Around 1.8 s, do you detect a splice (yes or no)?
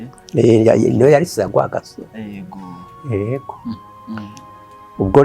no